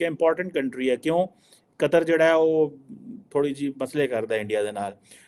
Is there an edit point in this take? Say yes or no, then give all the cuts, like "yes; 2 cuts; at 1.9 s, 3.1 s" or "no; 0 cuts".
no; 0 cuts